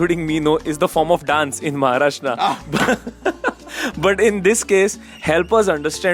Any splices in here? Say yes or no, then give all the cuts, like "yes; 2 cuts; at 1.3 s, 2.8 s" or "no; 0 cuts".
no; 0 cuts